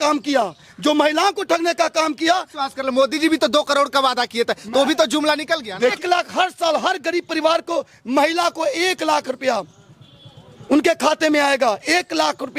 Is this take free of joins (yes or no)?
no